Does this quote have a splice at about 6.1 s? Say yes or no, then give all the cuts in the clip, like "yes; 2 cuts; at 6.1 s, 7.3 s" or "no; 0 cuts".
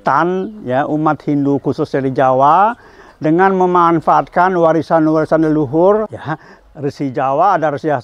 yes; 1 cut; at 6.1 s